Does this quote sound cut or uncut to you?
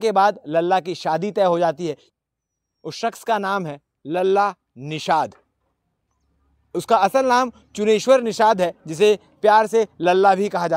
cut